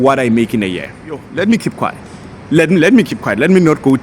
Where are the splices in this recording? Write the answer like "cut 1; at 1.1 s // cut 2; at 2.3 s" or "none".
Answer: cut 1; at 1.2 s

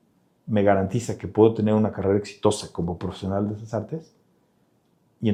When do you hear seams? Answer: none

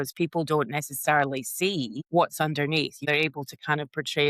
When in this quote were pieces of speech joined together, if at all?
cut 1; at 2.0 s // cut 2; at 3.0 s

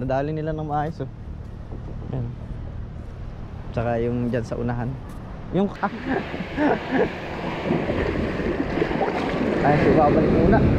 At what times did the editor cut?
cut 1; at 5.8 s

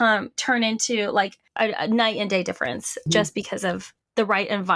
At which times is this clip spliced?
cut 1; at 1.4 s // cut 2; at 3.0 s

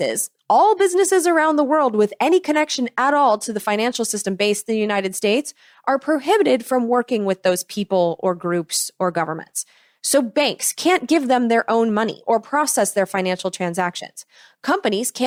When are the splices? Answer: none

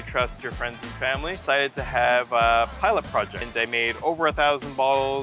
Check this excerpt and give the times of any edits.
cut 1; at 1.4 s // cut 2; at 3.5 s

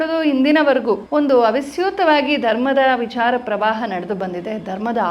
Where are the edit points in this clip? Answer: cut 1; at 1.0 s

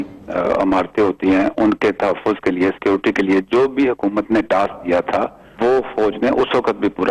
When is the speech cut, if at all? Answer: cut 1; at 5.4 s

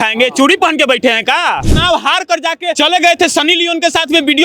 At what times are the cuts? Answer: cut 1; at 1.7 s // cut 2; at 2.8 s

